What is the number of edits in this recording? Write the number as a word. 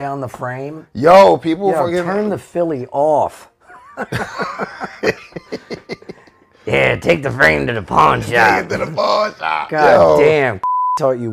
zero